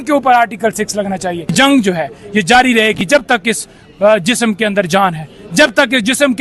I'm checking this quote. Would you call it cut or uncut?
cut